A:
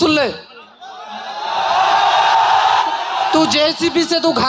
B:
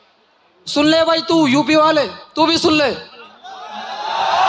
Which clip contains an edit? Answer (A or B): A